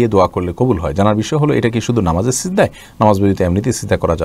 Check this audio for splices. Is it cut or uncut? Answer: uncut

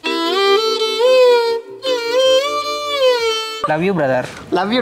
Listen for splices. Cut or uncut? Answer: cut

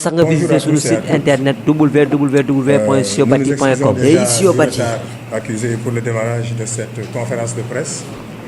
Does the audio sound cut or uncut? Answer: cut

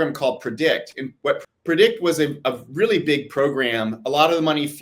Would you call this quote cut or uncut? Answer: cut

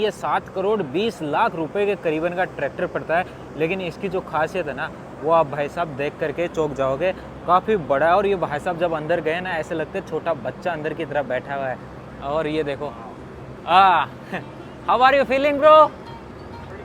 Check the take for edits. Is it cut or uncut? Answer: uncut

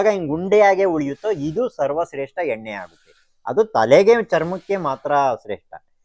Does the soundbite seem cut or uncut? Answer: uncut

